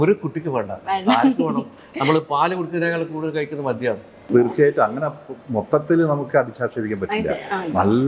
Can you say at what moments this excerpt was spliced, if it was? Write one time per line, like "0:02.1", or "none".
0:04.1